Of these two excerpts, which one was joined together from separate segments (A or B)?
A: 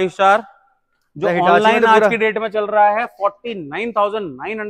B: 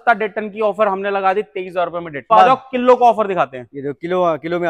B